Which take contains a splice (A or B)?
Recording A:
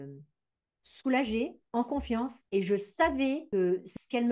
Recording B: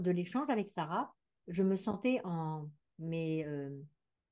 A